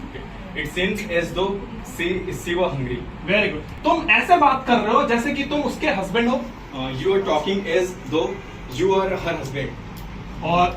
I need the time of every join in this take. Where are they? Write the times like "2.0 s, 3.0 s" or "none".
3.7 s